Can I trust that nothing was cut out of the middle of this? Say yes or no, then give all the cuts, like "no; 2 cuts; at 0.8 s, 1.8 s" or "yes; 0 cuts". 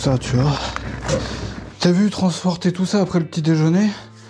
no; 1 cut; at 1.4 s